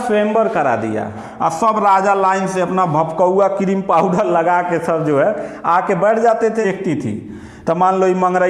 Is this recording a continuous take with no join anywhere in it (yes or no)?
no